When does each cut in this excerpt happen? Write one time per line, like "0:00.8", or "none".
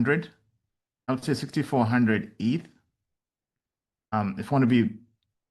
0:01.1
0:04.1